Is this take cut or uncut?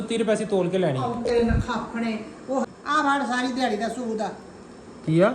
cut